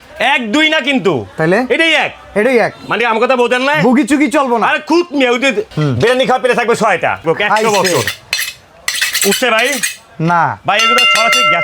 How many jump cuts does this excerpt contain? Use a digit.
2